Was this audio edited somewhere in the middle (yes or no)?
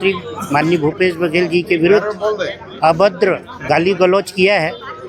no